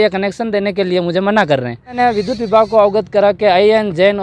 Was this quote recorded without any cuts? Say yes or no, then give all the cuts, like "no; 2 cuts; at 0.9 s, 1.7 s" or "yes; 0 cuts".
no; 1 cut; at 2.0 s